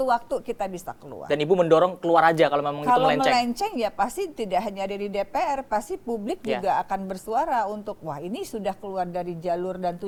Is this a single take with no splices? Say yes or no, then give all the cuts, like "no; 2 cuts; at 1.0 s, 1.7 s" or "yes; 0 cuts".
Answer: yes; 0 cuts